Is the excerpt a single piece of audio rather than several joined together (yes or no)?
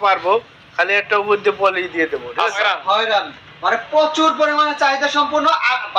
no